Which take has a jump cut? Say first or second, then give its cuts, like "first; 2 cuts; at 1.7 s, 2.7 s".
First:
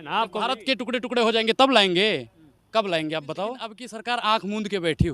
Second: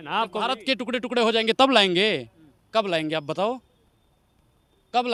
first; 1 cut; at 3.9 s